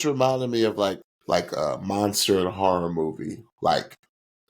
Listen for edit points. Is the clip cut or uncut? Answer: cut